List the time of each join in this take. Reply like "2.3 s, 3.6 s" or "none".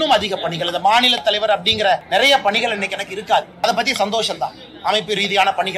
2.0 s, 3.6 s